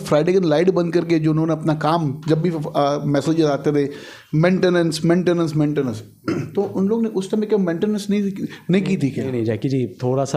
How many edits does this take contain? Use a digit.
0